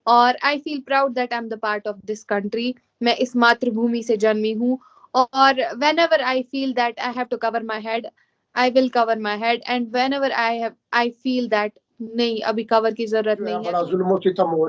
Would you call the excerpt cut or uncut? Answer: cut